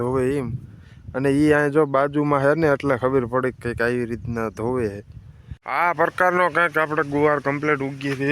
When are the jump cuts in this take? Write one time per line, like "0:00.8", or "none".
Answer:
0:05.5